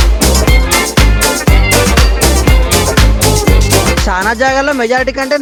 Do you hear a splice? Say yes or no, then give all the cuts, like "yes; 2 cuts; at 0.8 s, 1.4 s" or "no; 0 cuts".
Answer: no; 0 cuts